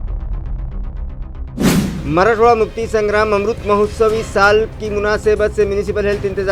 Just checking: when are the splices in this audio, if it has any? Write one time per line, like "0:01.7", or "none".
0:01.6